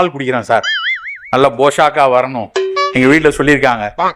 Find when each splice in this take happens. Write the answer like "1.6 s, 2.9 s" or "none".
none